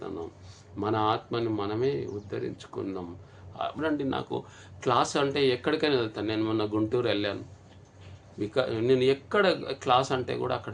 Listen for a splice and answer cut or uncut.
cut